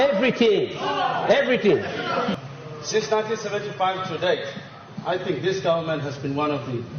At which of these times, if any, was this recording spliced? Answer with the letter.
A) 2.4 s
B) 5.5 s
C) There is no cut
A